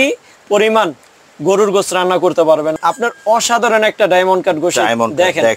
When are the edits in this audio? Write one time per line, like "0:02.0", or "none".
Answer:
0:02.7